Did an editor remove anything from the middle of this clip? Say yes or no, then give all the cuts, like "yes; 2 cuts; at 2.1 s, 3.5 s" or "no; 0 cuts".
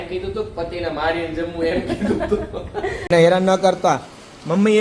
yes; 1 cut; at 3.0 s